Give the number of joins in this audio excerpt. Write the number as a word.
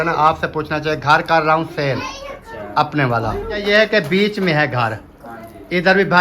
one